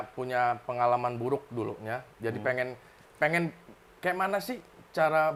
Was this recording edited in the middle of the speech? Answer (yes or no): no